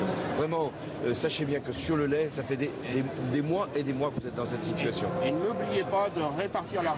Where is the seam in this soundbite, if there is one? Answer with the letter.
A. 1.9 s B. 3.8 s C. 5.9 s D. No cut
D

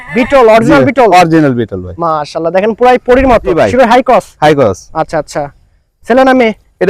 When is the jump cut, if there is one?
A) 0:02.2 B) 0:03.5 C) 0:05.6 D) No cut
B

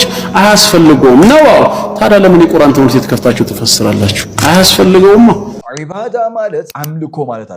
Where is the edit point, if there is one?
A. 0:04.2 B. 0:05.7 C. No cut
B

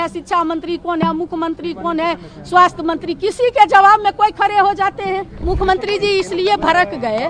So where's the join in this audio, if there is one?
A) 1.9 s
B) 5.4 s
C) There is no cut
B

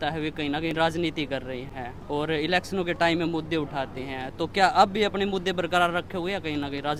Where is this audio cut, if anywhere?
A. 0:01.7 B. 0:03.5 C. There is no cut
C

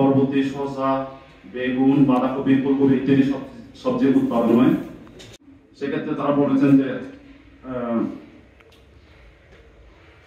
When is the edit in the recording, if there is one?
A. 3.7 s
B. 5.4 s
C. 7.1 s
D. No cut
B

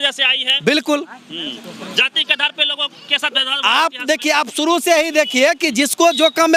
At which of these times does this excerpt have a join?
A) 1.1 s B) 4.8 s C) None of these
C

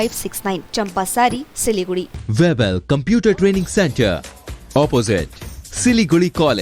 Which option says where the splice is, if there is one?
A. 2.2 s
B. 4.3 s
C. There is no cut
A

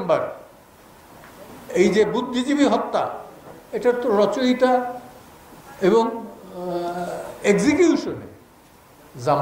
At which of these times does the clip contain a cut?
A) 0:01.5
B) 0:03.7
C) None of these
C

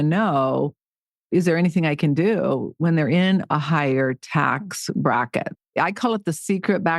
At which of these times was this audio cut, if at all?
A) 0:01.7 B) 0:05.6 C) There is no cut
B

